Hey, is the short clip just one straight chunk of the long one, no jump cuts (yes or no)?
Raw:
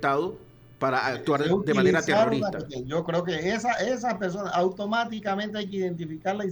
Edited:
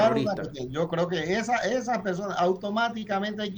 yes